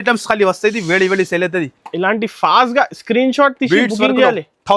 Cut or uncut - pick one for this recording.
uncut